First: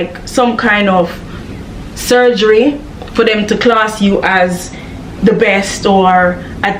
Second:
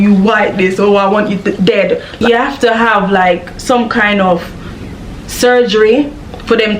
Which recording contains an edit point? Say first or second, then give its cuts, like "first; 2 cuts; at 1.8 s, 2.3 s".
second; 1 cut; at 2.1 s